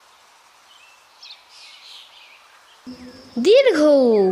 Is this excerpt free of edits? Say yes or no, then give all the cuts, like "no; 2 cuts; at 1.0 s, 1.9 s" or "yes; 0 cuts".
no; 1 cut; at 2.8 s